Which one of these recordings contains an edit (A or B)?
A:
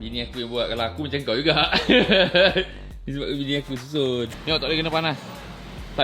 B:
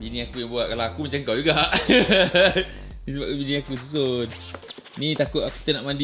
A